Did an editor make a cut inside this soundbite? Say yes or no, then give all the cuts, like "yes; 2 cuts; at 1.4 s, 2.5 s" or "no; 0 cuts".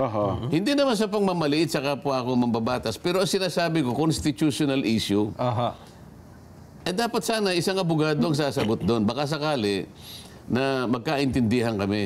no; 0 cuts